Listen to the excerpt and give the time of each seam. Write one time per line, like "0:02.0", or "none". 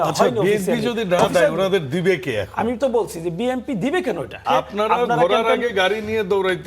0:04.4